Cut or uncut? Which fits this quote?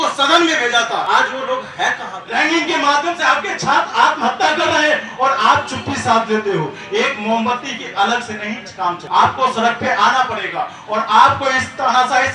cut